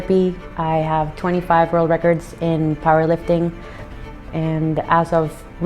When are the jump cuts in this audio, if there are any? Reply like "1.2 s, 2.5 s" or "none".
4.0 s